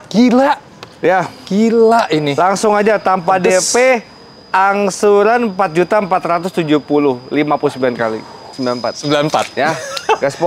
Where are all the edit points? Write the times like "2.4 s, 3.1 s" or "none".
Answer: 8.5 s